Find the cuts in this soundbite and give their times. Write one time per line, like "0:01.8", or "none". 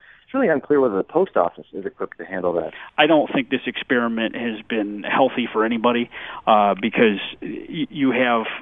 0:02.8